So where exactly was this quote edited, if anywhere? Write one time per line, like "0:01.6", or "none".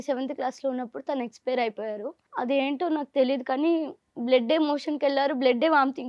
0:02.2

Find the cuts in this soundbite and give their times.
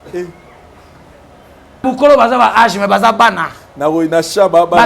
0:01.8

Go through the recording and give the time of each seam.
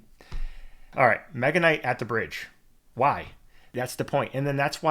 0:00.8
0:03.7

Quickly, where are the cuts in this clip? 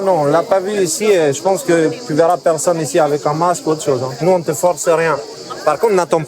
0:04.2

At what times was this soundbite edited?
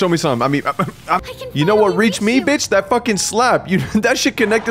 0:01.2

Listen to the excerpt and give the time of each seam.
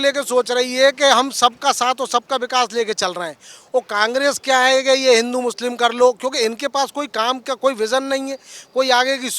none

